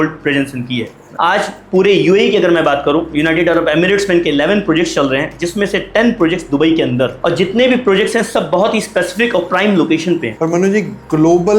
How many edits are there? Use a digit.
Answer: 1